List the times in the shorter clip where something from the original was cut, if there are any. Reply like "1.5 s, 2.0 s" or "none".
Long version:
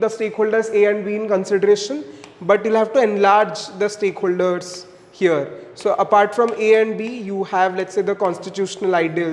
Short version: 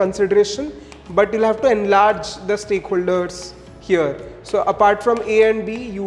none